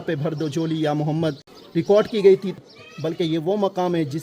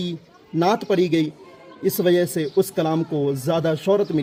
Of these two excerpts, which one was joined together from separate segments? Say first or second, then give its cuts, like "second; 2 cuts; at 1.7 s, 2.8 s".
first; 2 cuts; at 1.5 s, 2.5 s